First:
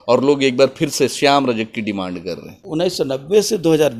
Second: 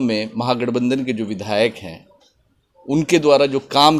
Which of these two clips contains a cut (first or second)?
first